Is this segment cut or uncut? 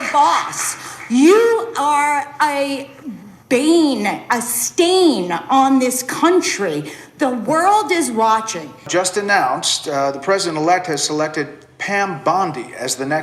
cut